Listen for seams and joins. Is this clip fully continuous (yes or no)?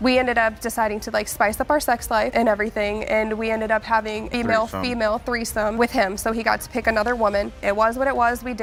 yes